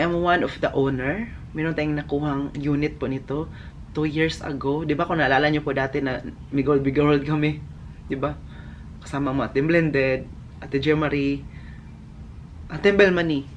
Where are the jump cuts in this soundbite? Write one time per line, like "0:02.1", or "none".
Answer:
none